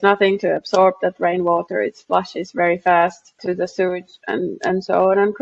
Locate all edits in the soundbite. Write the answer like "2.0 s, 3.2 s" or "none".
3.4 s